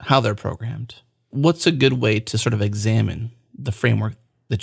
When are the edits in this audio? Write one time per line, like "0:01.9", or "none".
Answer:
0:01.3